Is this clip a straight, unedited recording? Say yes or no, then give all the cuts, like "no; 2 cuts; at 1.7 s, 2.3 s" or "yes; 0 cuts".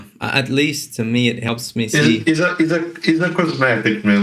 yes; 0 cuts